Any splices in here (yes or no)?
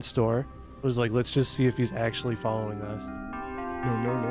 no